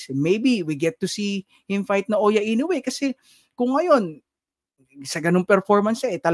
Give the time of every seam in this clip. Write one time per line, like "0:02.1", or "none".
none